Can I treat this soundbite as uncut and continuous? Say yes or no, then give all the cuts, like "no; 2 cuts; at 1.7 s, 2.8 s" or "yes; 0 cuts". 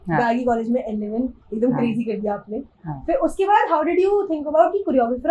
yes; 0 cuts